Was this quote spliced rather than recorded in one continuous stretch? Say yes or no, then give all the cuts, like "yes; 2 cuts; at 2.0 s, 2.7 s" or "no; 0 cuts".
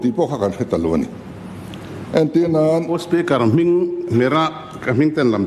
no; 0 cuts